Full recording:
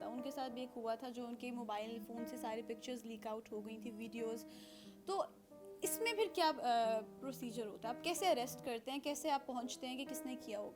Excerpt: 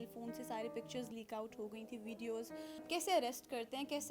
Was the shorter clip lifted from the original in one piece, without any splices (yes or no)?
no